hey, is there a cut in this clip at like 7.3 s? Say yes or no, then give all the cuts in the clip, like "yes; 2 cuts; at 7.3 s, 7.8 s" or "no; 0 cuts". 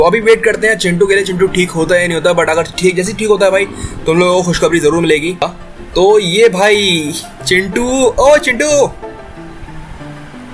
no; 1 cut; at 5.6 s